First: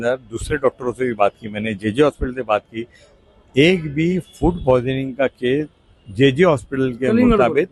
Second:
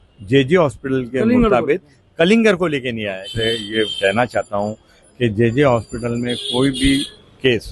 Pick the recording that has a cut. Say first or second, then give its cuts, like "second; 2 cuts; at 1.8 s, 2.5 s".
second; 1 cut; at 3.2 s